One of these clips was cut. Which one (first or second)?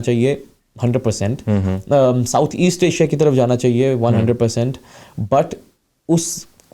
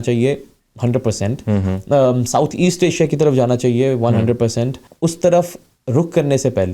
second